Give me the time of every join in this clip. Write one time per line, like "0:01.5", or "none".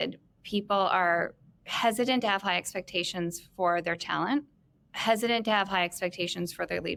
none

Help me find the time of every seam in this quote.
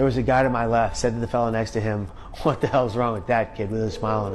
0:00.9
0:02.2

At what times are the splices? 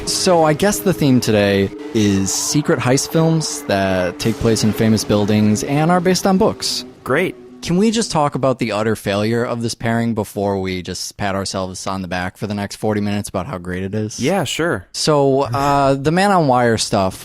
0:10.3

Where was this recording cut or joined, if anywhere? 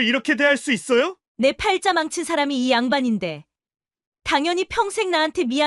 0:01.2

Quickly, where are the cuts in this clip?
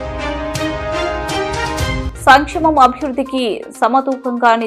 0:02.0

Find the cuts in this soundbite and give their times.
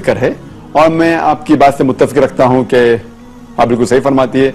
none

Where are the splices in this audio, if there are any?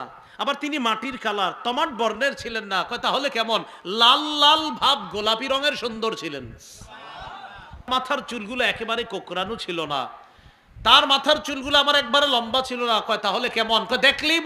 0:07.9

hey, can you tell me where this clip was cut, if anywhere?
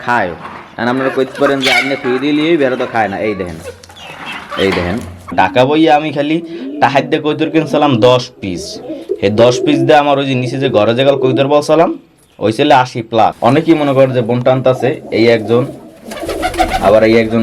0:05.3
0:13.4

